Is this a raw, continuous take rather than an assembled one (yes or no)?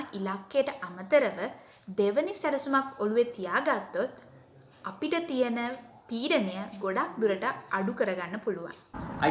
yes